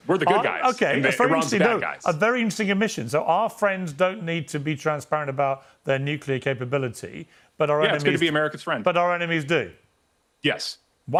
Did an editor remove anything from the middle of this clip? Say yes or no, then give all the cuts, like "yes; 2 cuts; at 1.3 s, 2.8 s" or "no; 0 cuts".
no; 0 cuts